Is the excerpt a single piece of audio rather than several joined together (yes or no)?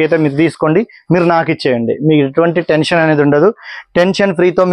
yes